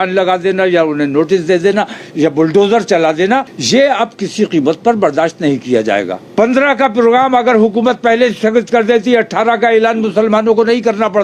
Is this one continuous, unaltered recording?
no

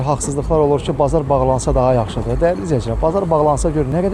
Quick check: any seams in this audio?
no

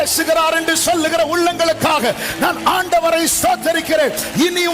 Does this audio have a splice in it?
no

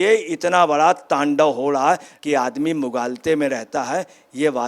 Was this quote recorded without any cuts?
no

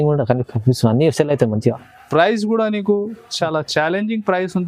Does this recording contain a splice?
no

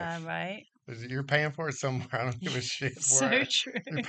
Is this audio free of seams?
yes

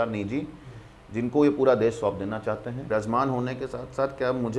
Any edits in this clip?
yes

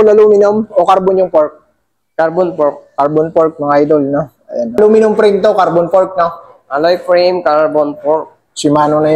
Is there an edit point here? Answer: yes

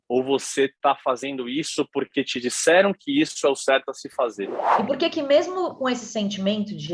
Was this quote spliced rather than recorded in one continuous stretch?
yes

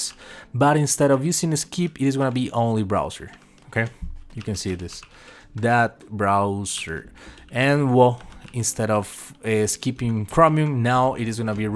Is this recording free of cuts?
yes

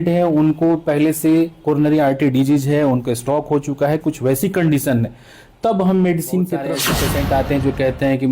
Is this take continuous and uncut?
no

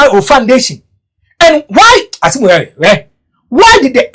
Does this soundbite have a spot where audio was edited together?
no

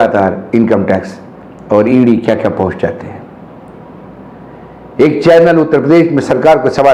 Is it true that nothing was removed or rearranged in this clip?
yes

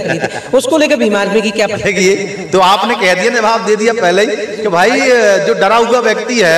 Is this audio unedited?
yes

